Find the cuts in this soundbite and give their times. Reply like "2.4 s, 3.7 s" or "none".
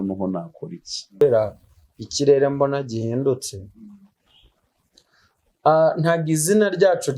1.2 s